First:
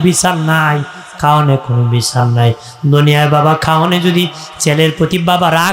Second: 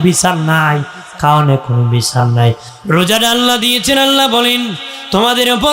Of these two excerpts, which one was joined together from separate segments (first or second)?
second